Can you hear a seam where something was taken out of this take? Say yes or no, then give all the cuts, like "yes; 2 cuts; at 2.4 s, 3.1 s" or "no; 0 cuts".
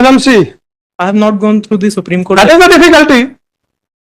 no; 0 cuts